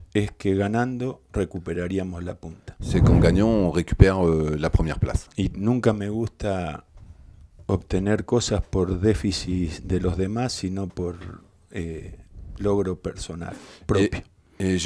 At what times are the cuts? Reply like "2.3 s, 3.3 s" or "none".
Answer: 4.6 s